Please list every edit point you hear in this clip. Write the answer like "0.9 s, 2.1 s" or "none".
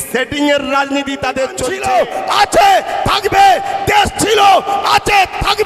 1.7 s